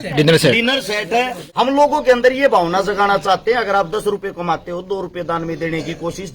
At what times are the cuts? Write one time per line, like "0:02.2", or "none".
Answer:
0:01.4